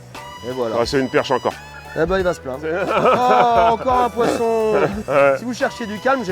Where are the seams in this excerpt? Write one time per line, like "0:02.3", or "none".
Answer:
0:02.8
0:05.0